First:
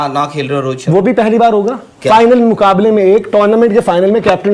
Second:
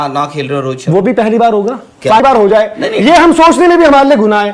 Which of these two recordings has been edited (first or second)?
second